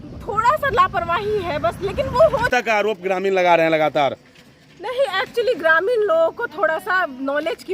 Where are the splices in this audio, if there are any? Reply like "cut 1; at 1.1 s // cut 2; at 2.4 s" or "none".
cut 1; at 2.3 s